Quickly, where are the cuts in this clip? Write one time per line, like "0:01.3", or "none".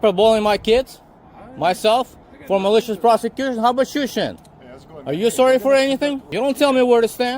0:06.2